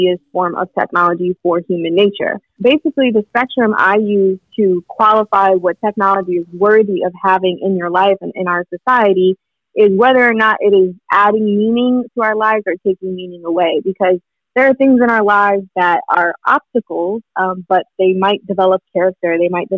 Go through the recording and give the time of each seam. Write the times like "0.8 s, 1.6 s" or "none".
2.5 s